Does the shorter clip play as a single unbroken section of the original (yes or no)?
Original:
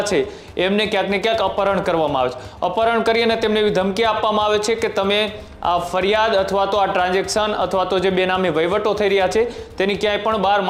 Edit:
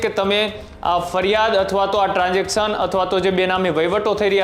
yes